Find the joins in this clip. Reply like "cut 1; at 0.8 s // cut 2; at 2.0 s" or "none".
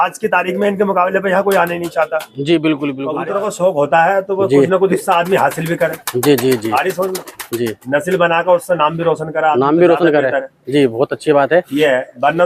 cut 1; at 3.1 s